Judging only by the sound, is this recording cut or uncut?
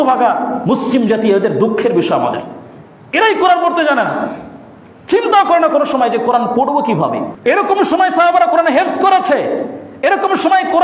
cut